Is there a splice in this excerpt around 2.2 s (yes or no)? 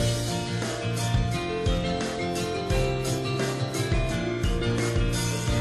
yes